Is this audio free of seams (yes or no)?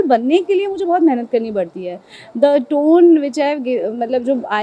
yes